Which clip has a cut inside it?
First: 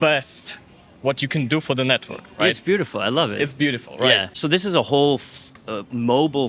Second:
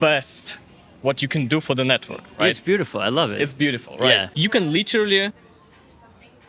second; 2 cuts; at 4.3 s, 5.3 s

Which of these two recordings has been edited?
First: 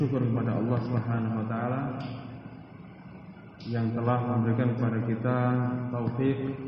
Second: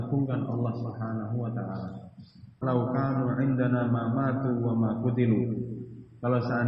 second; 1 cut; at 2.6 s

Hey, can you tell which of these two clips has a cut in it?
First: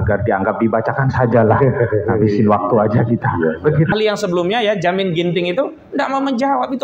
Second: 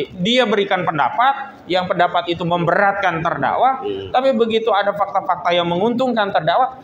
first; 1 cut; at 3.9 s

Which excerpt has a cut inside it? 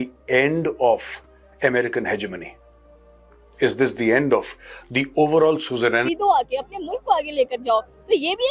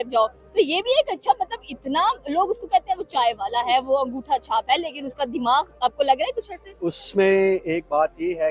first; 1 cut; at 6.2 s

